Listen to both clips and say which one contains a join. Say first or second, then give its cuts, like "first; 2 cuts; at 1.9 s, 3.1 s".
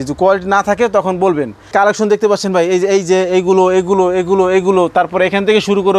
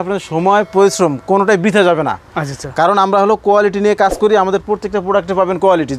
first; 1 cut; at 1.7 s